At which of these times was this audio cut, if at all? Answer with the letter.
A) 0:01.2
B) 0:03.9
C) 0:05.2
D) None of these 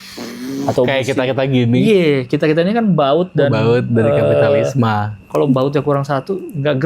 C